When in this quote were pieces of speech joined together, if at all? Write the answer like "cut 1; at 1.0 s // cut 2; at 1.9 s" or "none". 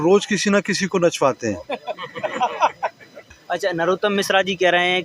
cut 1; at 3.3 s